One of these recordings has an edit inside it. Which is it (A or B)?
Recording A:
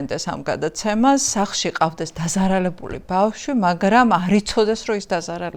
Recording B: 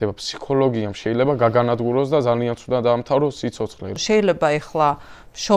B